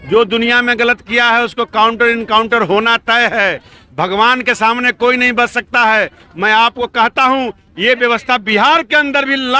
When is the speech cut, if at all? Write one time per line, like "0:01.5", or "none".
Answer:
none